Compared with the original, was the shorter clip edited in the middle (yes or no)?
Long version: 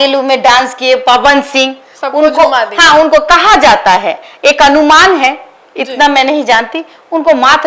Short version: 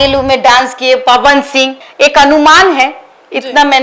yes